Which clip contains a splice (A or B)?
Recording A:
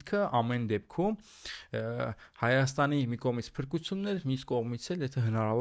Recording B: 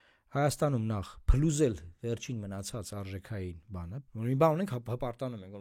B